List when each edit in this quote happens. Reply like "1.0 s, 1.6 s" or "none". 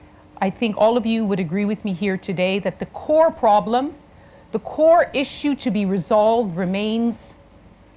4.5 s